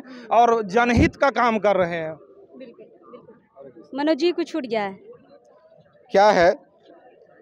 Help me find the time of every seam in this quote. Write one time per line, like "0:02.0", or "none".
none